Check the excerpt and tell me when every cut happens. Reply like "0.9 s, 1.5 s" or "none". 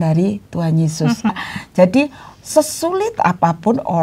1.3 s